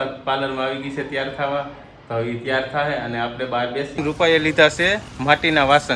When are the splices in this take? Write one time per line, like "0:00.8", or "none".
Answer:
0:03.9